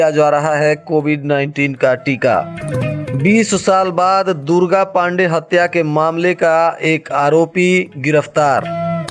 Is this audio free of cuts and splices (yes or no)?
yes